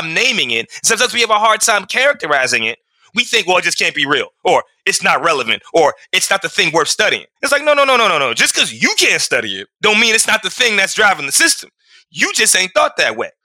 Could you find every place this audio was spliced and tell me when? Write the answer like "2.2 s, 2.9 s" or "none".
none